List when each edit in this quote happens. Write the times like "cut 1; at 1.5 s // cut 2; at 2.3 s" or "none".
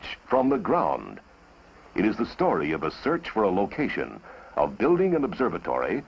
none